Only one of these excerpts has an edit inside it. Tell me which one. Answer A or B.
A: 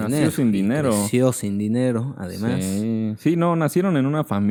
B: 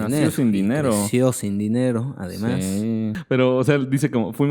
B